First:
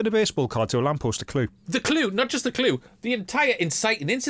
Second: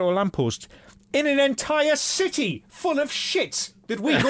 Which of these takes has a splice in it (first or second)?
first